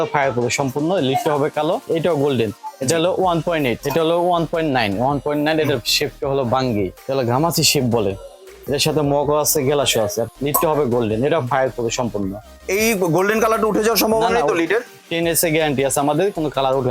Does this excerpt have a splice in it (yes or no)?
yes